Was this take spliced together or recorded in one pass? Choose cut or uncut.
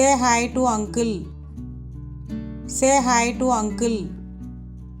cut